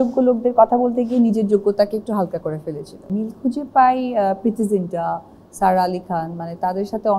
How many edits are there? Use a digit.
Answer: 1